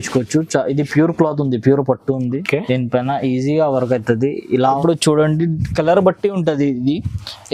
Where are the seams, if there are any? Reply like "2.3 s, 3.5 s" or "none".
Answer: 4.8 s

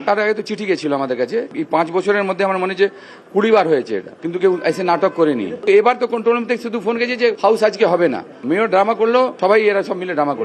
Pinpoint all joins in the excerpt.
1.5 s, 7.4 s, 9.3 s

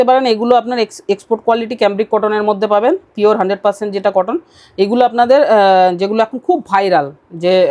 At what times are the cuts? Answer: none

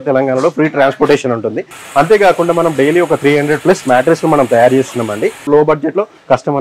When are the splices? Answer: 5.4 s

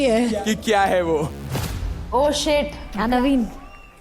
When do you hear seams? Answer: 2.9 s

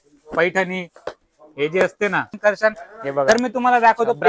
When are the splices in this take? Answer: 2.3 s

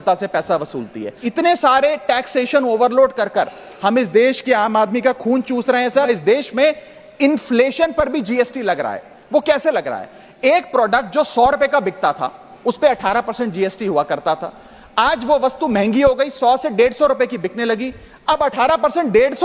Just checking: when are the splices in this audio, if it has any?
1.2 s, 6.1 s

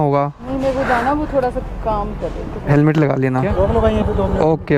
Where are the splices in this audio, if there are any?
3.5 s

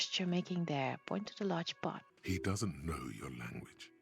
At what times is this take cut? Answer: 2.0 s

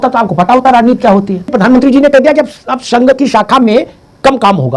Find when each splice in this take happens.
1.5 s

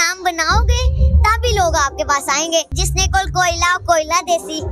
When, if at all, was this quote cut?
2.8 s

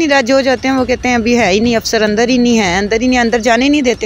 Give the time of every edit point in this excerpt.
none

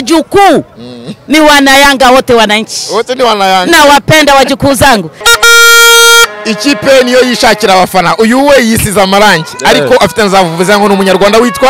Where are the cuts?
5.1 s

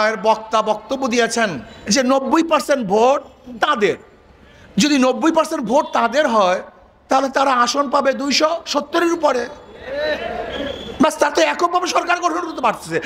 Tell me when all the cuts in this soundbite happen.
1.7 s

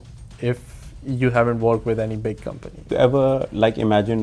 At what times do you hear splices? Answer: 2.9 s

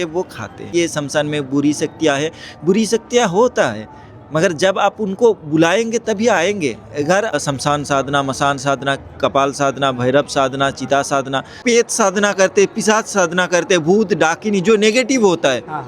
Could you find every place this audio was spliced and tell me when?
0.7 s, 7.4 s, 11.6 s

